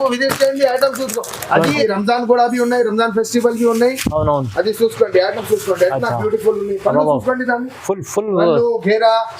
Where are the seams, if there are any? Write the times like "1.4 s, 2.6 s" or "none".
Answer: 1.8 s